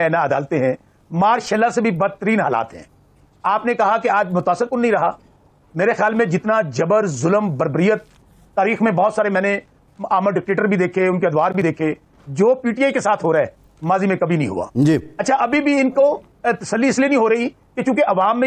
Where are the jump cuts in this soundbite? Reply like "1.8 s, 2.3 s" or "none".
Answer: none